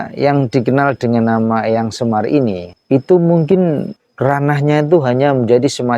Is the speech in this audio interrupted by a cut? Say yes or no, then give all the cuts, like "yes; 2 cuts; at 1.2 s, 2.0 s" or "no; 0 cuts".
yes; 2 cuts; at 2.7 s, 4.0 s